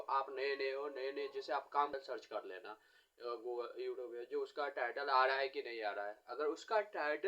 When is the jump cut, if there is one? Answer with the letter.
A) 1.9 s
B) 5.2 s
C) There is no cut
A